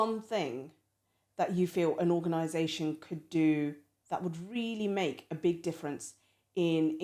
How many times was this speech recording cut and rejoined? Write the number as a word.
zero